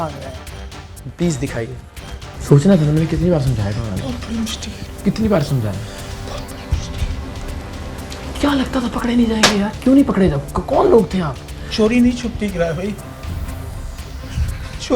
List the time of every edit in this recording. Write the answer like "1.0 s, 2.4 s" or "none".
none

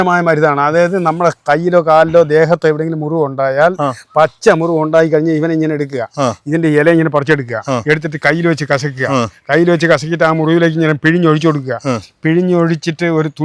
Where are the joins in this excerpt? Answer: none

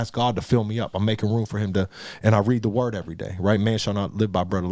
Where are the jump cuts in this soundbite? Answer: none

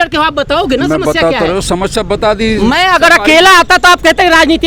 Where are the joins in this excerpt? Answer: none

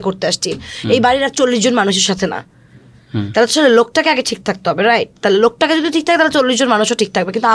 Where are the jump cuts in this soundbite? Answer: none

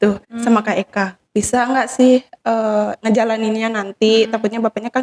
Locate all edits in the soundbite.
1.2 s

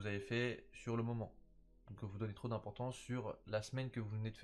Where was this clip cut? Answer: none

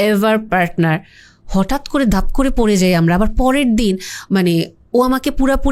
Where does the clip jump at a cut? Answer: none

